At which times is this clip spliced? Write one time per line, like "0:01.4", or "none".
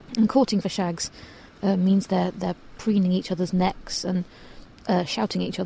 none